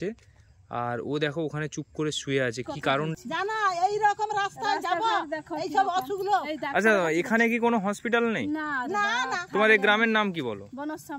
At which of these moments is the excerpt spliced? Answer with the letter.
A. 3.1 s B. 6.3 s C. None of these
A